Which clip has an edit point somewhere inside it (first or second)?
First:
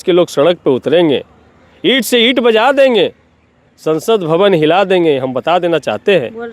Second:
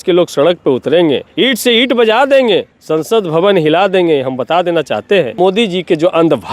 second